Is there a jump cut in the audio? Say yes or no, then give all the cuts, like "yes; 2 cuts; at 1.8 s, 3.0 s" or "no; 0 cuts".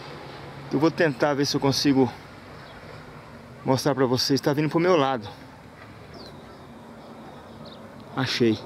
yes; 1 cut; at 6.1 s